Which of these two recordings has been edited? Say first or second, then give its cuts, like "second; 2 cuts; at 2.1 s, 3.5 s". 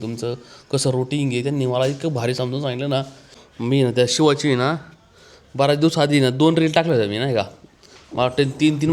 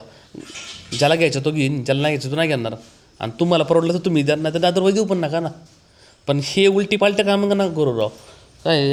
first; 1 cut; at 3.2 s